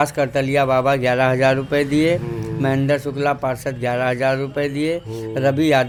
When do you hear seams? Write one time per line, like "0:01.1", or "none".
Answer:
none